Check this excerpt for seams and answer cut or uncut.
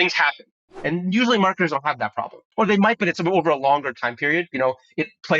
cut